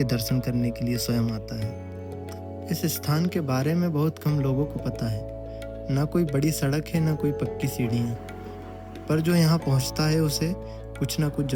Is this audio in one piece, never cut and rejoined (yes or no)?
yes